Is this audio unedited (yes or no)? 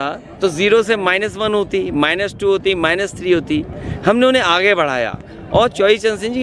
yes